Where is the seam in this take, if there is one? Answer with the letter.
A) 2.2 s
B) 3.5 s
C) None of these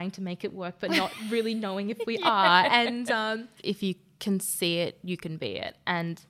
B